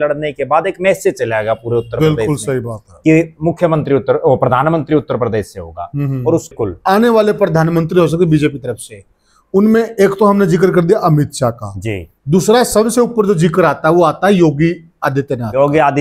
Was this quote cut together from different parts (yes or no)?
yes